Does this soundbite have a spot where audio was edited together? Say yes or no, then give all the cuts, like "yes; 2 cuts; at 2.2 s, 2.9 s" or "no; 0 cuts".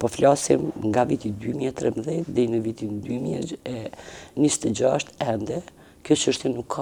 no; 0 cuts